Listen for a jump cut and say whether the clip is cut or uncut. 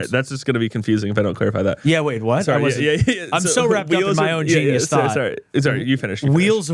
uncut